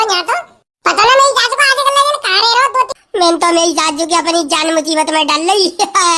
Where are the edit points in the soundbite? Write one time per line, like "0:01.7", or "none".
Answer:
0:02.9